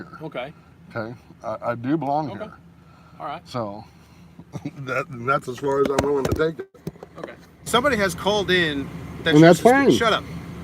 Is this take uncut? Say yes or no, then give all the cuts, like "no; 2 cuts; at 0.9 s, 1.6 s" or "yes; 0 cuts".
no; 1 cut; at 7.6 s